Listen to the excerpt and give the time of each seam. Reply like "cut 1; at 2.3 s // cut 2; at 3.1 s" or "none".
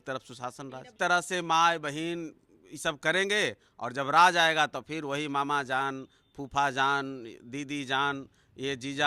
cut 1; at 0.9 s